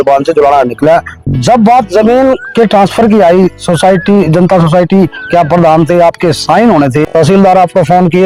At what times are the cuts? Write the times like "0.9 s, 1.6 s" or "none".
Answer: 1.2 s, 7.1 s